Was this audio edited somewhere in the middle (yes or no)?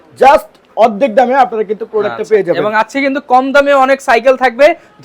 no